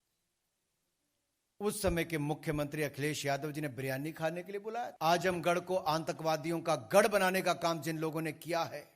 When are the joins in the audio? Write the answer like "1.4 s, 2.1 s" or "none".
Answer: 4.9 s